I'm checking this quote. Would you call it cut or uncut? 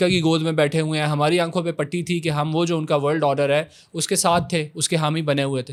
uncut